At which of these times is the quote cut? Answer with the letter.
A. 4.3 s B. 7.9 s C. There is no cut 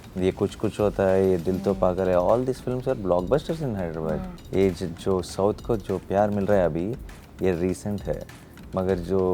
A